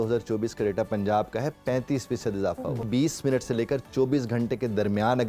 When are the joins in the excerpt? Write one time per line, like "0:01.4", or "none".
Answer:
0:02.8